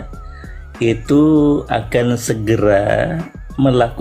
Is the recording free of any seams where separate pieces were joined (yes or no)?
yes